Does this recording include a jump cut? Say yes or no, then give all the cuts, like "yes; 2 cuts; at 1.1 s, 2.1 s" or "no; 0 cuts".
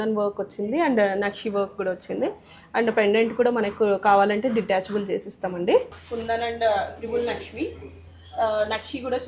yes; 1 cut; at 6.0 s